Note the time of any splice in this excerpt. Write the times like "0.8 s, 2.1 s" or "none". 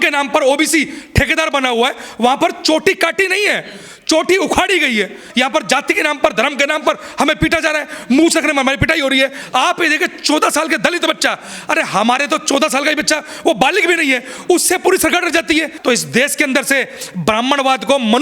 5.2 s, 9.4 s, 15.7 s

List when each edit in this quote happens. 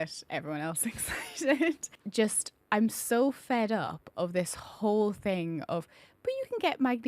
1.9 s

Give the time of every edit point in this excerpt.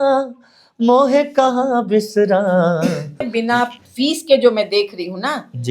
3.3 s

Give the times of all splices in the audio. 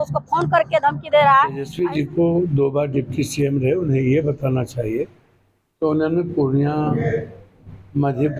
1.6 s

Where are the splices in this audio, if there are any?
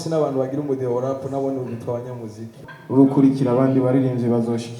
2.5 s

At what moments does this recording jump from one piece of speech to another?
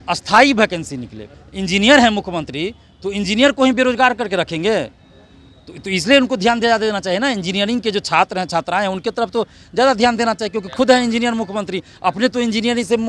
1.3 s

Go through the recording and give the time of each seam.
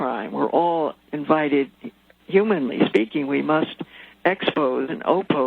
1.1 s

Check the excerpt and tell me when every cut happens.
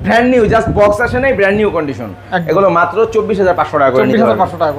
none

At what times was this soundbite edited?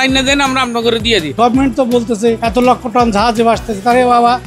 1.3 s, 2.4 s

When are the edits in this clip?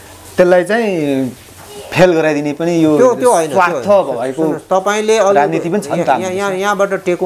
none

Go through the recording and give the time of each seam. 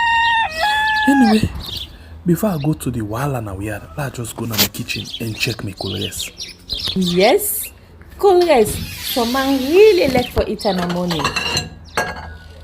1.0 s

